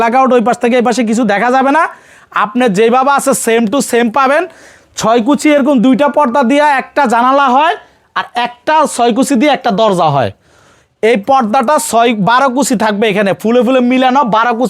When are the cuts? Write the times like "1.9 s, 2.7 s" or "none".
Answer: none